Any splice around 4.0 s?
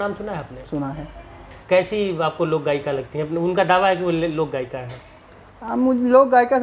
no; 0 cuts

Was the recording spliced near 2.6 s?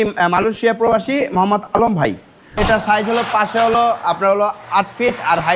yes; 1 cut; at 2.6 s

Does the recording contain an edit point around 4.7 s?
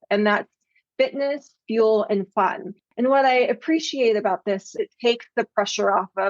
yes; 1 cut; at 4.7 s

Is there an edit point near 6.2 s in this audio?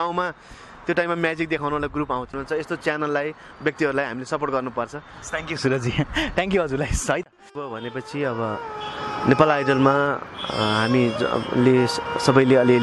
no; 2 cuts; at 2.4 s, 7.7 s

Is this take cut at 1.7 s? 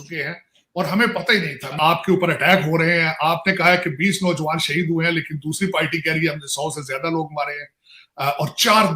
yes; 1 cut; at 1.7 s

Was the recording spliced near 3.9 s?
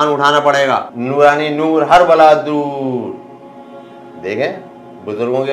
no; 1 cut; at 0.9 s

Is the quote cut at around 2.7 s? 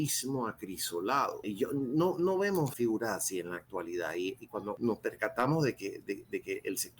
yes; 3 cuts; at 1.4 s, 2.7 s, 4.8 s

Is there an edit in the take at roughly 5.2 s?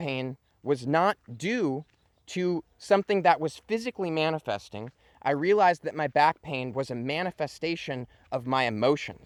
no; 0 cuts

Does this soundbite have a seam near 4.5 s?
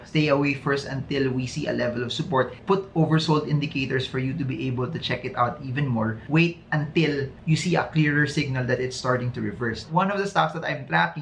no; 2 cuts; at 6.2 s, 9.8 s

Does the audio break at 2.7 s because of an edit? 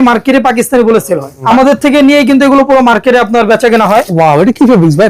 no; 2 cuts; at 1.4 s, 4.1 s

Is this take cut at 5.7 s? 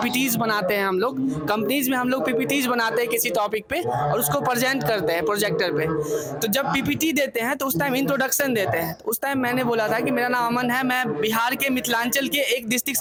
no; 0 cuts

